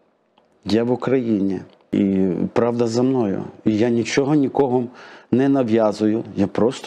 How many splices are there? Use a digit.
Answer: 1